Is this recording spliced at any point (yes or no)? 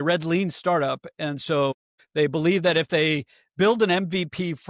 no